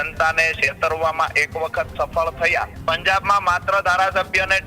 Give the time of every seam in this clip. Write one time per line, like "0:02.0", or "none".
0:02.7

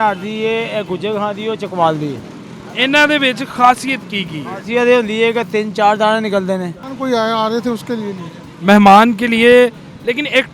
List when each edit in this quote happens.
0:06.9

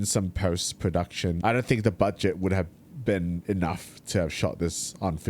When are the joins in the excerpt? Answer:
0:01.4

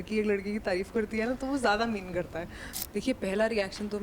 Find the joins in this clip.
0:02.7

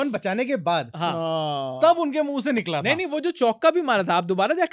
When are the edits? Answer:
none

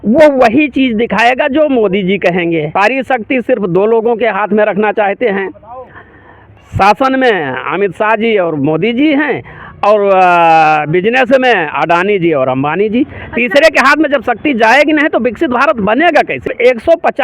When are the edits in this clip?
0:02.7
0:16.5

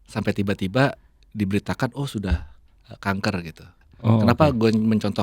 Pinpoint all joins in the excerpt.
0:03.8

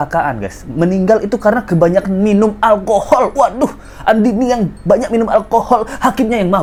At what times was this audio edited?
none

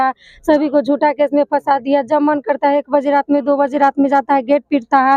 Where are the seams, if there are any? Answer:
none

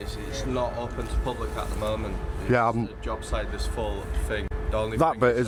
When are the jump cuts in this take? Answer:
none

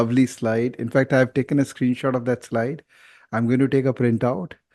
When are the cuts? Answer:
none

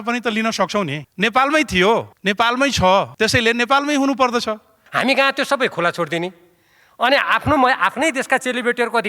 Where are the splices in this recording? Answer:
0:01.0
0:02.1
0:03.1
0:04.8

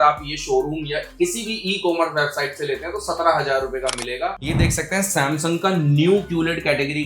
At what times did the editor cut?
0:04.6

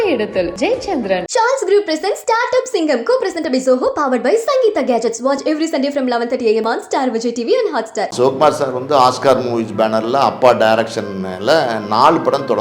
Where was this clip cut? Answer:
0:08.1

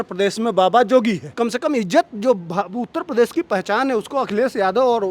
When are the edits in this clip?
0:01.3

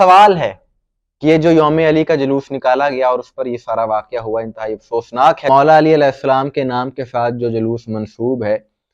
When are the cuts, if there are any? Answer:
0:05.4

